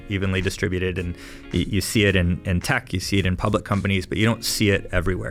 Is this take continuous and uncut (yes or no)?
yes